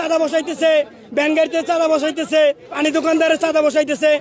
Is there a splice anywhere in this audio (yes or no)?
yes